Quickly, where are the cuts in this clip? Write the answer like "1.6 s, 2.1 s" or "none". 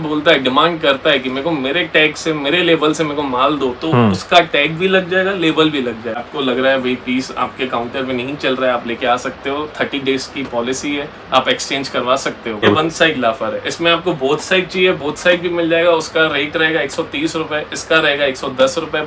6.2 s, 12.7 s